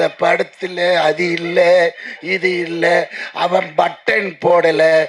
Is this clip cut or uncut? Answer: uncut